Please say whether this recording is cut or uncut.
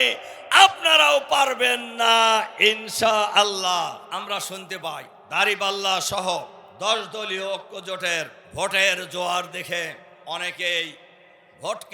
cut